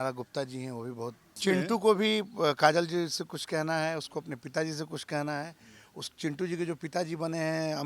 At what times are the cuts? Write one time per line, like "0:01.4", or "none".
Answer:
0:01.3

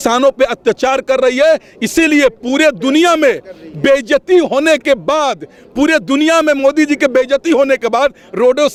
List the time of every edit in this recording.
none

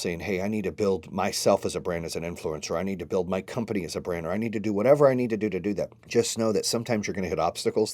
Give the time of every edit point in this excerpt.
0:06.0

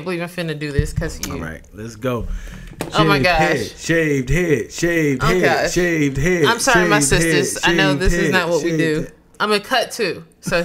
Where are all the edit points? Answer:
0:09.3

